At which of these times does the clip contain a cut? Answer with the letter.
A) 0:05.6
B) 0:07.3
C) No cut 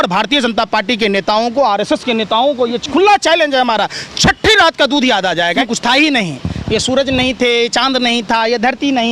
A